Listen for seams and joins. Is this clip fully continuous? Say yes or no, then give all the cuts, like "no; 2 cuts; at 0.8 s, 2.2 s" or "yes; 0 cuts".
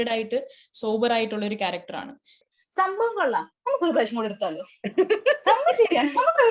no; 1 cut; at 2.4 s